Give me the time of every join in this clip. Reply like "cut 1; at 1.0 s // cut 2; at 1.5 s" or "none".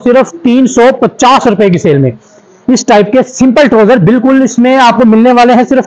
none

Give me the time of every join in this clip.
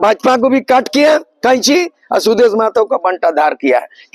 none

